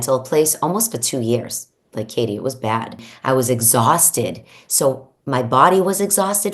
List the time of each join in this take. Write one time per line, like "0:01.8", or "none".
0:03.1

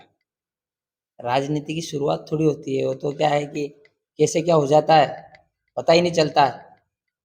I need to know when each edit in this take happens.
none

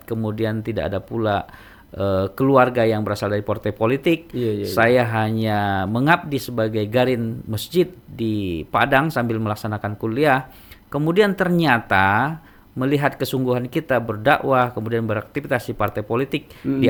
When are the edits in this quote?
none

